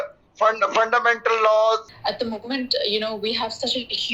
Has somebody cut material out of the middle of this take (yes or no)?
yes